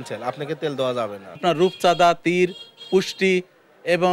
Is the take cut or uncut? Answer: cut